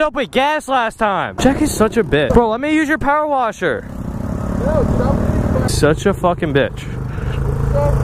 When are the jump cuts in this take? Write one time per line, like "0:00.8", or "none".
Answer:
0:01.3
0:02.3
0:05.7